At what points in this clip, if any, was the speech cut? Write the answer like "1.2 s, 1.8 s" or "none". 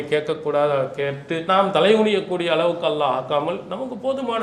1.4 s